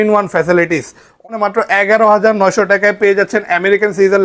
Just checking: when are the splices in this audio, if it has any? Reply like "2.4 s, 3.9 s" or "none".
1.3 s